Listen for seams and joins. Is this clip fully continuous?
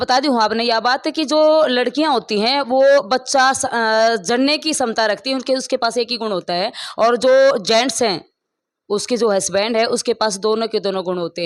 yes; 0 cuts

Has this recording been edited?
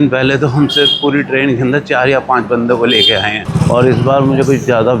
yes; 1 cut; at 3.4 s

